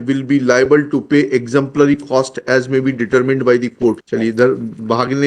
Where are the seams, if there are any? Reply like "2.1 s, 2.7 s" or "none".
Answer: 4.1 s